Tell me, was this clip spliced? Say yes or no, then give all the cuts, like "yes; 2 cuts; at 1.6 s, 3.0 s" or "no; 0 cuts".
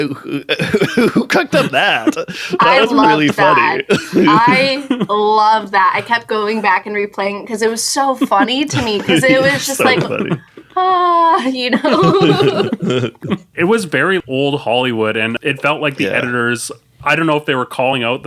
yes; 3 cuts; at 13.5 s, 14.2 s, 15.4 s